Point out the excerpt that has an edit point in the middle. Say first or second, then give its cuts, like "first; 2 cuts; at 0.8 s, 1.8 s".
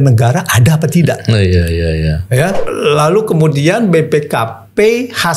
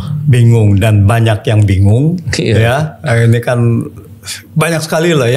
first; 1 cut; at 2.6 s